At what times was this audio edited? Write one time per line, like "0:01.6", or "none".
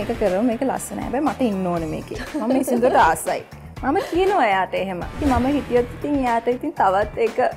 0:05.1

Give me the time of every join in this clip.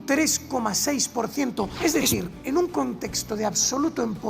0:01.7

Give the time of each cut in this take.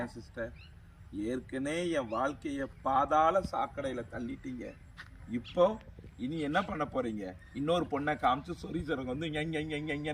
none

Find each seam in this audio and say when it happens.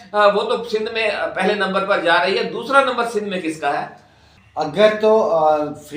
0:04.7

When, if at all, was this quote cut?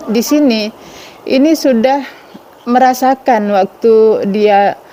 none

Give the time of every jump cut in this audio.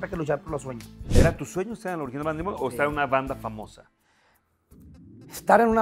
0:01.1

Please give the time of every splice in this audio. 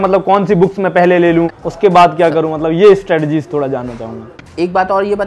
0:01.6
0:04.3

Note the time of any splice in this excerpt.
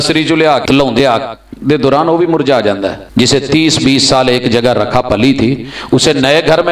0:01.0
0:03.0

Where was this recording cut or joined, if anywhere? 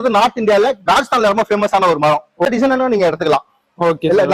0:02.5

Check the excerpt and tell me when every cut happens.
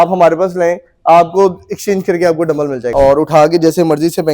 0:02.9

